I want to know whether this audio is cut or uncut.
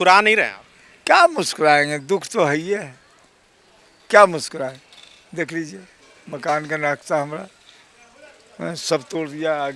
uncut